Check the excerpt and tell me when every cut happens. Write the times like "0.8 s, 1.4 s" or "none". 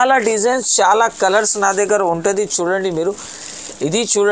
none